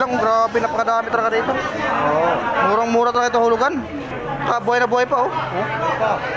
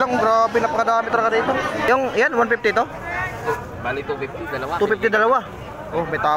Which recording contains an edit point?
second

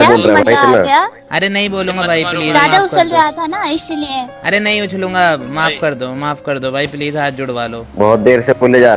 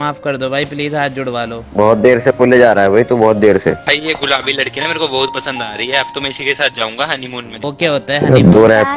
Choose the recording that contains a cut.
second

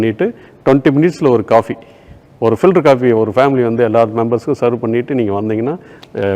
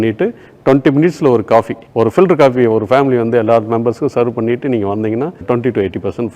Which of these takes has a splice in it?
second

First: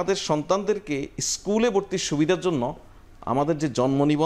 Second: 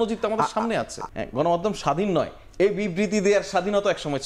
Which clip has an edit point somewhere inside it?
second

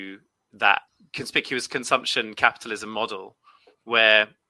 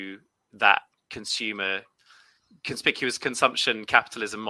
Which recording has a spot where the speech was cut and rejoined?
first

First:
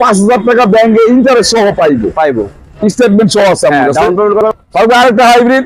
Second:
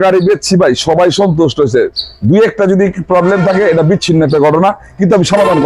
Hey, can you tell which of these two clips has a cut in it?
first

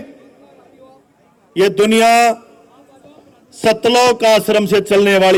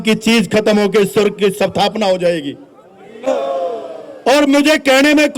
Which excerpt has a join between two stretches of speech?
second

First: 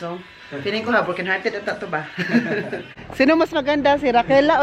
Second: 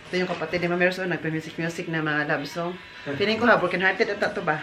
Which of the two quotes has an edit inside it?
first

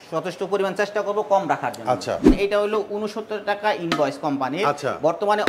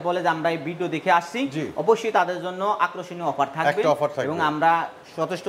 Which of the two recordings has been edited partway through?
first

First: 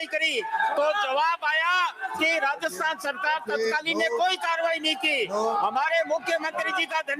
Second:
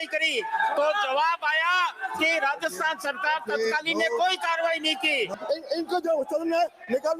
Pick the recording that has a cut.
second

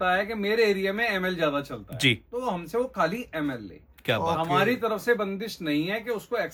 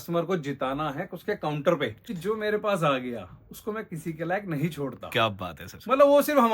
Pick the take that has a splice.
second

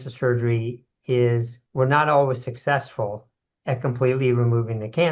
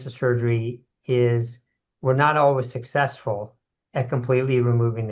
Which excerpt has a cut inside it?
first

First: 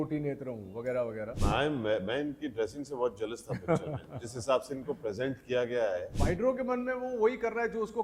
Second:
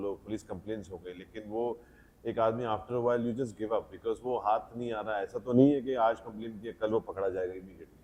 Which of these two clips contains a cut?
first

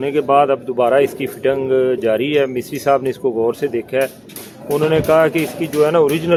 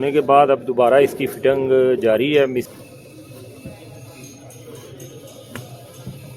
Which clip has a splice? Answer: second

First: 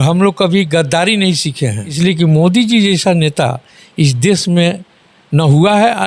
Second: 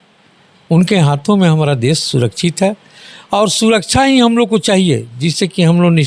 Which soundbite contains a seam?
first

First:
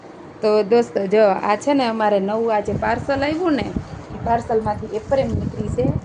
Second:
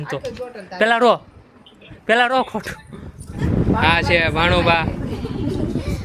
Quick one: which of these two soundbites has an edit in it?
second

